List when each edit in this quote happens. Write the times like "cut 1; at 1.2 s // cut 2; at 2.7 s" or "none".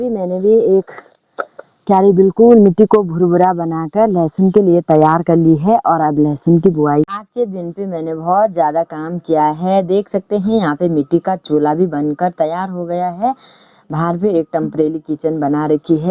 cut 1; at 7.1 s